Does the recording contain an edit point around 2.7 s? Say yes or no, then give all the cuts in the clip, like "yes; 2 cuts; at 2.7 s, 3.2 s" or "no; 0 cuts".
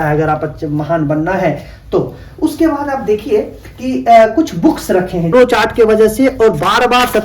no; 1 cut; at 5.3 s